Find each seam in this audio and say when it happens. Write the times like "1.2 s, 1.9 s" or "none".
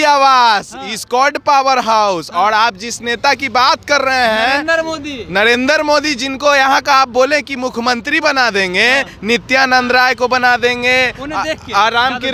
none